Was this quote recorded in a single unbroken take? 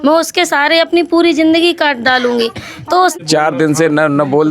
no; 1 cut; at 3.1 s

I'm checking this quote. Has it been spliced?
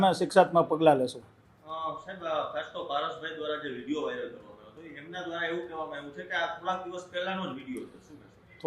no; 0 cuts

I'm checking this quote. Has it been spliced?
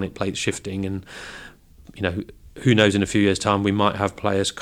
no; 0 cuts

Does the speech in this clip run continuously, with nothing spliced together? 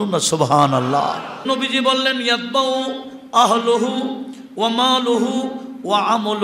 no; 1 cut; at 1.4 s

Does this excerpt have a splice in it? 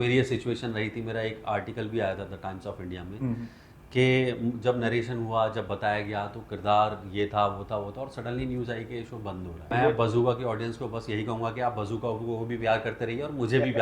yes; 1 cut; at 9.7 s

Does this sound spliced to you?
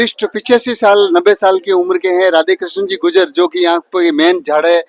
no; 0 cuts

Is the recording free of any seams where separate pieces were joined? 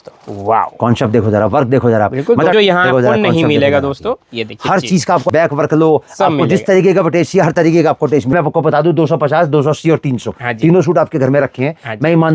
no; 3 cuts; at 2.5 s, 5.2 s, 8.3 s

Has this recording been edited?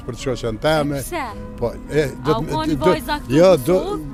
no; 0 cuts

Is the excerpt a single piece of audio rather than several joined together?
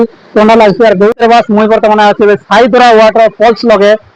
no; 1 cut; at 1.1 s

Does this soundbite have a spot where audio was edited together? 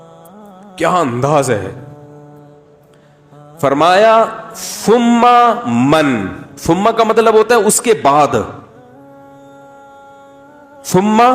yes; 5 cuts; at 0.8 s, 1.8 s, 3.6 s, 9.1 s, 10.7 s

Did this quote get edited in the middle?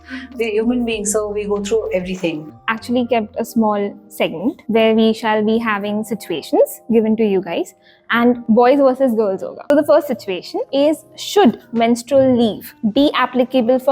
yes; 6 cuts; at 2.5 s, 4.6 s, 8.4 s, 9.7 s, 10.6 s, 12.7 s

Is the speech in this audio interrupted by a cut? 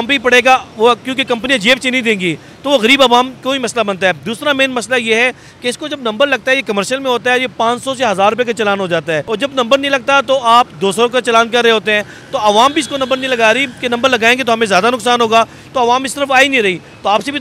no; 0 cuts

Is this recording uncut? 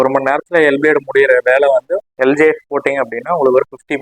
yes; 0 cuts

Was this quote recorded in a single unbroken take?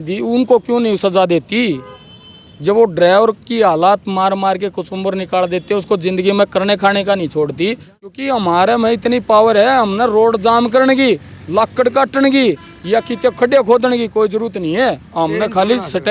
no; 1 cut; at 8.2 s

